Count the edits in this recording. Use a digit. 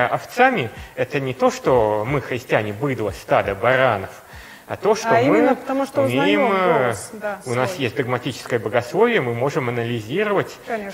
0